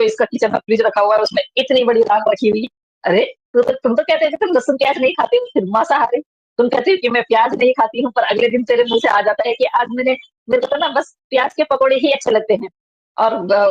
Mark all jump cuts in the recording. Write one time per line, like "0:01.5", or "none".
none